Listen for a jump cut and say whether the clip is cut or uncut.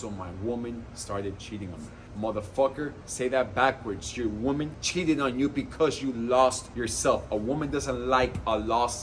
cut